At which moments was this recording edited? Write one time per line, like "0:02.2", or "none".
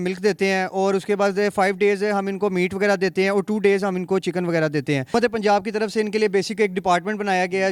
0:05.1

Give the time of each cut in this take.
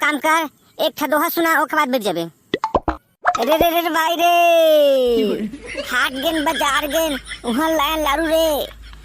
0:02.9

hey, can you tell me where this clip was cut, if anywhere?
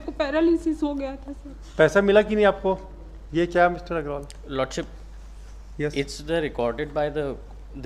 none

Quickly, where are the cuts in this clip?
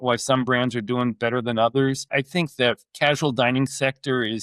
0:02.1

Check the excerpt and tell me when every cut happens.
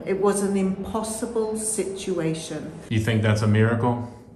0:02.7

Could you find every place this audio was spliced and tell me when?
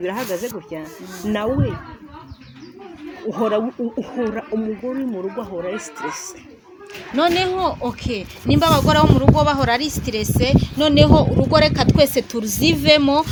none

